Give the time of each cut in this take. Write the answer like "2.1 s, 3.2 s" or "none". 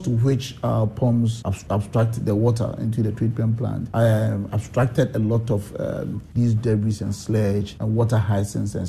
1.6 s